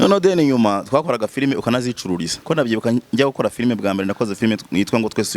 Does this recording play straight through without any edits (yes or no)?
no